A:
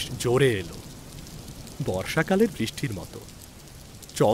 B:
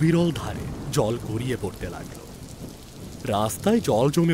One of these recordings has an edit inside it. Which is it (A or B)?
B